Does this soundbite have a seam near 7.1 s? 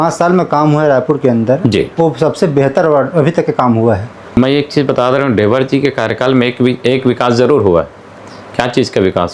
no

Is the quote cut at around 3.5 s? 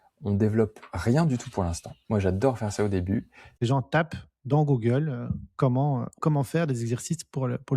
yes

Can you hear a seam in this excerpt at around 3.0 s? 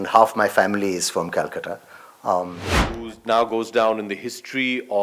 yes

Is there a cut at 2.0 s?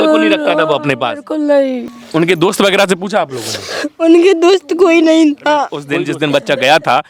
yes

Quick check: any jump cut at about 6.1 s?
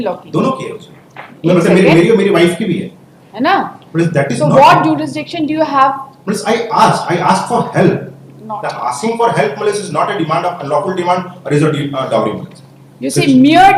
no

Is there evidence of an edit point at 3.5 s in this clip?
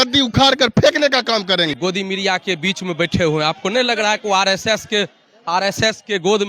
no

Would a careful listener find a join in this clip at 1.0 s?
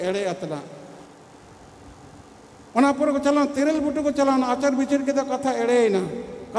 yes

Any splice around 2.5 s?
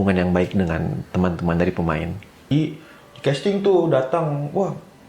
yes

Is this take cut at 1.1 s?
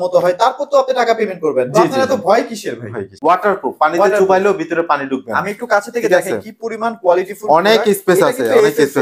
no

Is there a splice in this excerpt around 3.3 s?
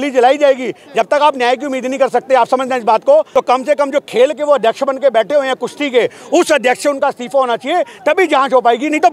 yes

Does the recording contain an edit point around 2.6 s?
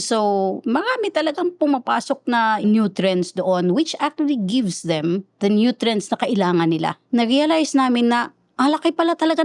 yes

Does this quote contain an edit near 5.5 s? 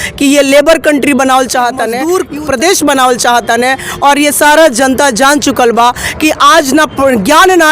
no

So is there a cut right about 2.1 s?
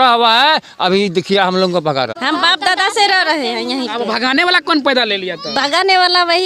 yes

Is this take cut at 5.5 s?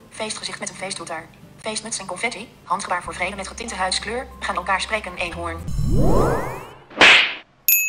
yes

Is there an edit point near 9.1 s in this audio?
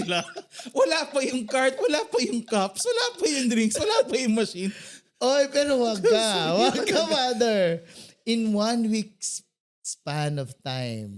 no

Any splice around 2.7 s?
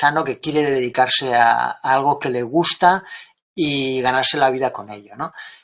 no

